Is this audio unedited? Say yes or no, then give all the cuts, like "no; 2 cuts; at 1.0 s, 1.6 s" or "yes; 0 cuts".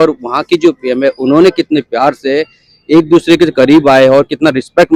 yes; 0 cuts